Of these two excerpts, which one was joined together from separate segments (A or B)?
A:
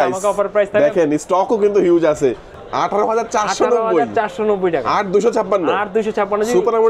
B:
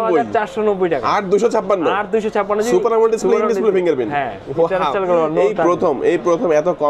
A